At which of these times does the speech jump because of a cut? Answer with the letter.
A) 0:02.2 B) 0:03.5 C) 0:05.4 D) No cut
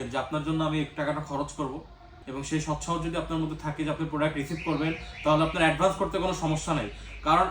A